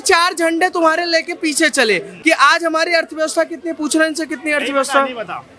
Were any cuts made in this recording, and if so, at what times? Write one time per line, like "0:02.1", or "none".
0:02.1